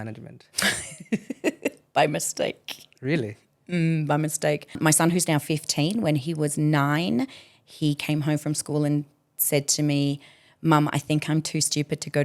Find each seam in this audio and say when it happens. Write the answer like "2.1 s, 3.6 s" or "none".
4.8 s